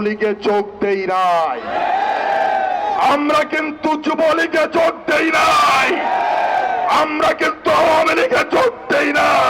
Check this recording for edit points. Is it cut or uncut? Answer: uncut